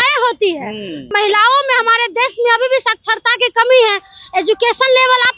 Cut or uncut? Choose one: cut